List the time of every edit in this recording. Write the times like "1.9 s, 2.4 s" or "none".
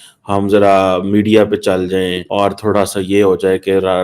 2.2 s